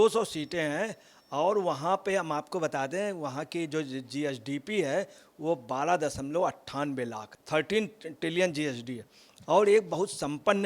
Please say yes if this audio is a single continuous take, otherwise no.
no